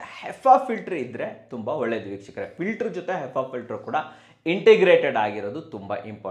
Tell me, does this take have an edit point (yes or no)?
no